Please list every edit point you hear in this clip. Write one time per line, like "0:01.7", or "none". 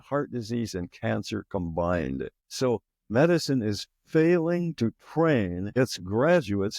0:02.4
0:05.6